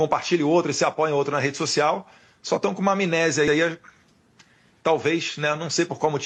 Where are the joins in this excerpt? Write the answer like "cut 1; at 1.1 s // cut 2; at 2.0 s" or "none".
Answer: none